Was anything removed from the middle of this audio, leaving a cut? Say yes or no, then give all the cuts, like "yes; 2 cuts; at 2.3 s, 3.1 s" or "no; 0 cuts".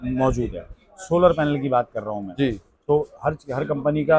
no; 0 cuts